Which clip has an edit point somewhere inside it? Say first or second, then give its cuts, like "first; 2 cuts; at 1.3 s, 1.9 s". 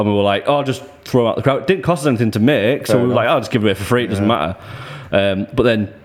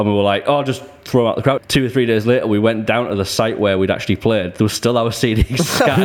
second; 1 cut; at 1.6 s